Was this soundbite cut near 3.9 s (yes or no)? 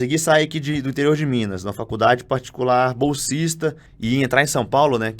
yes